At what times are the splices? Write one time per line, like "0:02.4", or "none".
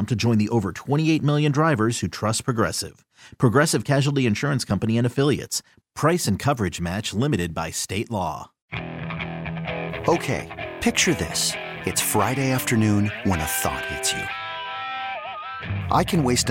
0:08.6